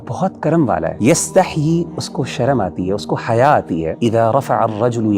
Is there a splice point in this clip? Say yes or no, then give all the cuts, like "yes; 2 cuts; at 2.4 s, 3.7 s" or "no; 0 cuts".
yes; 2 cuts; at 1.0 s, 3.9 s